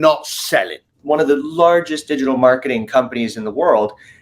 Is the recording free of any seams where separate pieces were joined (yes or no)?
no